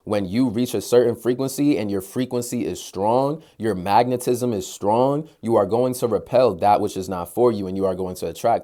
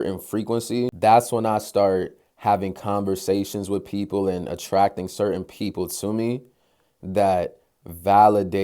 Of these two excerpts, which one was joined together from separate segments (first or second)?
second